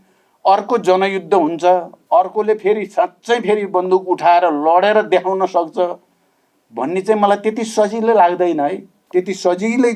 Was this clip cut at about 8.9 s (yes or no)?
yes